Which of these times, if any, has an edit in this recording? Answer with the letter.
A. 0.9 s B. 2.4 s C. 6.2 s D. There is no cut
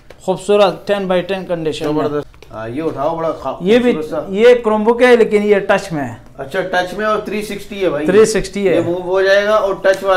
B